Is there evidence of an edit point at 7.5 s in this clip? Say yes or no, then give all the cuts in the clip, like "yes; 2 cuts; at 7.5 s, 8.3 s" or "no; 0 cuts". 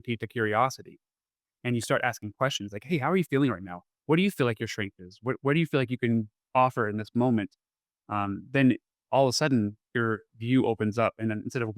no; 0 cuts